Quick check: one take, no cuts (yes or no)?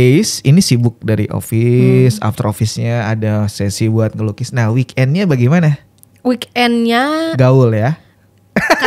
yes